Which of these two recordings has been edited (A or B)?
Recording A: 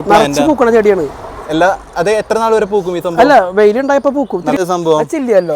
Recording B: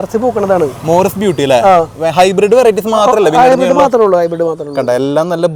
A